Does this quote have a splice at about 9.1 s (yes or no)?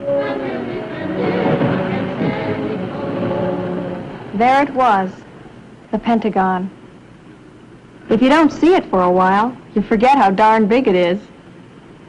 no